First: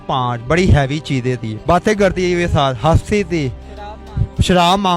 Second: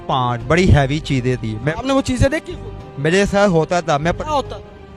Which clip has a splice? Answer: first; 1 cut; at 1.5 s

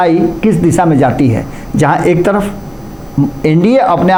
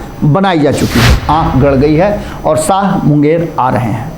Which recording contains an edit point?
second; 1 cut; at 1.2 s

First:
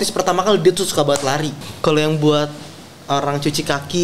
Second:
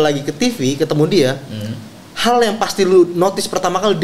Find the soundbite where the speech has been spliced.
first; 1 cut; at 1.6 s

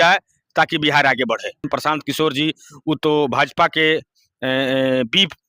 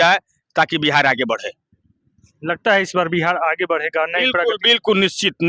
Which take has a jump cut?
first; 1 cut; at 1.7 s

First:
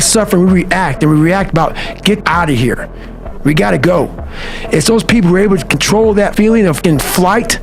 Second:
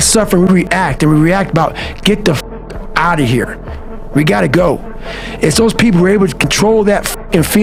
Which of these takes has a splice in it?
first; 2 cuts; at 2.2 s, 6.6 s

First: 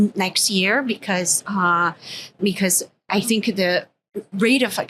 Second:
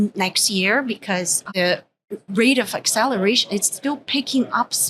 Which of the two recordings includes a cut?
second; 1 cut; at 1.5 s

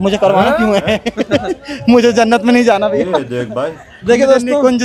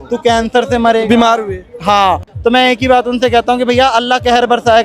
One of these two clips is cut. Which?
second; 1 cut; at 2.3 s

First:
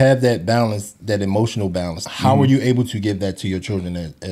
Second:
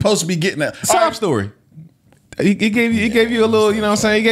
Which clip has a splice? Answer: first; 1 cut; at 2.0 s

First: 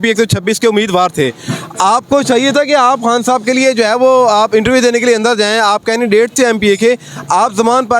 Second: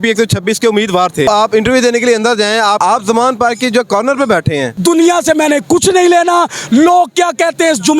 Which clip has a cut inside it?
second; 3 cuts; at 1.3 s, 2.8 s, 4.7 s

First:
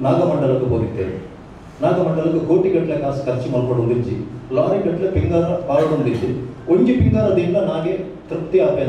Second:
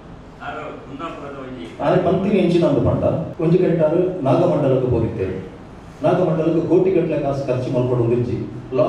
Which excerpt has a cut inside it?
second; 1 cut; at 3.3 s

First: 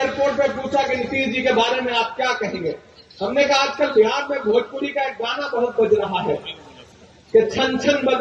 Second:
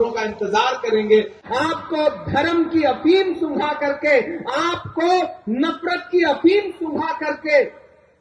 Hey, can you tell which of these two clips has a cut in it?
second; 1 cut; at 1.4 s

